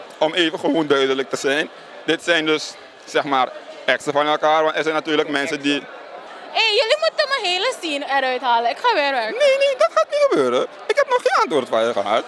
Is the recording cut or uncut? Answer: cut